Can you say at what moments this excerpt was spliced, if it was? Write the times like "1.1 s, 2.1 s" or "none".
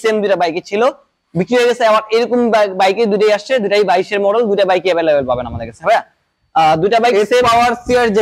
none